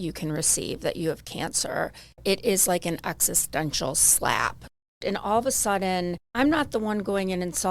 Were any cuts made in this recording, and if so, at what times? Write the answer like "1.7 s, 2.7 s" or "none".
2.2 s, 4.8 s, 6.2 s